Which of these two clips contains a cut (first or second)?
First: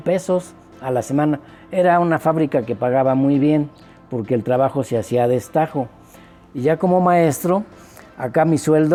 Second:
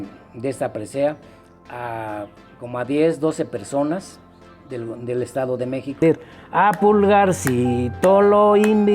second